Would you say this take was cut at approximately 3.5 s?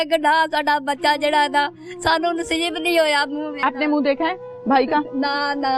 yes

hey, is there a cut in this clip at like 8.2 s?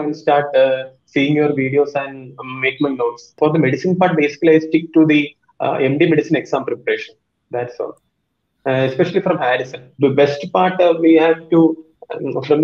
no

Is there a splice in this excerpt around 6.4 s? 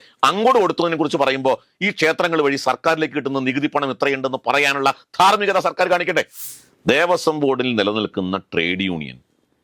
yes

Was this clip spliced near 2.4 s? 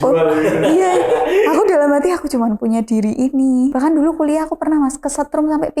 no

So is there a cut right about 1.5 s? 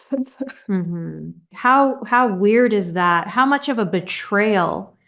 yes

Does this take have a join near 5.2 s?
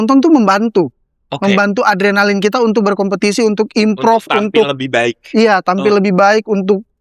no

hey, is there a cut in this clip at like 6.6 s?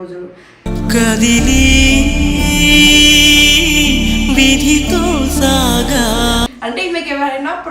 yes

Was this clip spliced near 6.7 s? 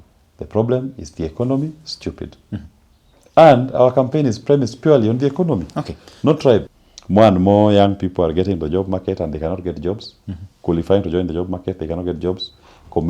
yes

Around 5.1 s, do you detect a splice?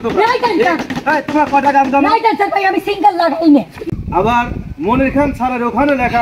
no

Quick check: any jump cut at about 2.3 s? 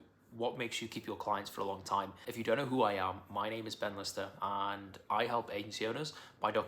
yes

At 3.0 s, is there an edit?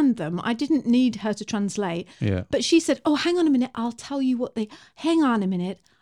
no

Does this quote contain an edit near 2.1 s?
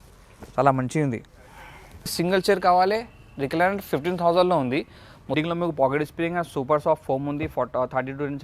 yes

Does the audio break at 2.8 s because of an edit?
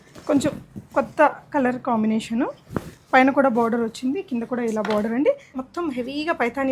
no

